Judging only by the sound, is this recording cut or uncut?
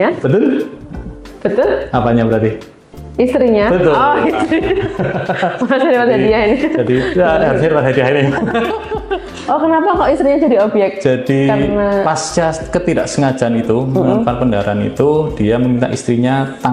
uncut